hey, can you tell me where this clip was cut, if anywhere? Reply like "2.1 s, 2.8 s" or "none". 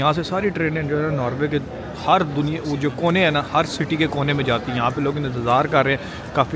none